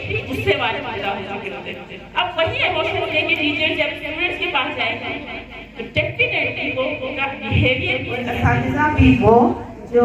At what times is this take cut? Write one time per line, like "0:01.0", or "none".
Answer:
0:08.4